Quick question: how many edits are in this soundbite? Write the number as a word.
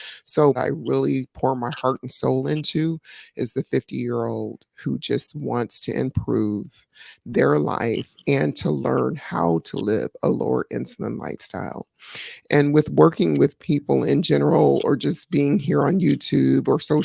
zero